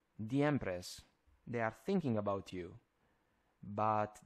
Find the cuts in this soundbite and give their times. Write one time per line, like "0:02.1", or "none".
none